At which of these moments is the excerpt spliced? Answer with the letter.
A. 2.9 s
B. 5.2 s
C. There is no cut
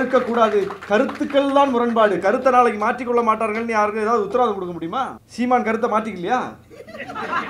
B